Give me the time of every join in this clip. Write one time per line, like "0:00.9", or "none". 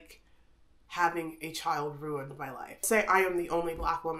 0:02.8